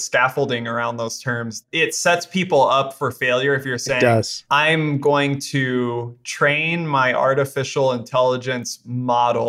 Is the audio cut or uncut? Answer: cut